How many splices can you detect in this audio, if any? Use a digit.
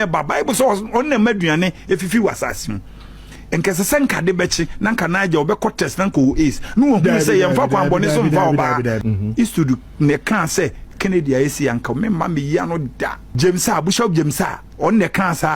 2